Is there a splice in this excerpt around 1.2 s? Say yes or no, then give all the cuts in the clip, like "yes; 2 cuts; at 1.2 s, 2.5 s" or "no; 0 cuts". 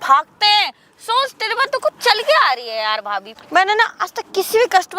no; 1 cut; at 3.3 s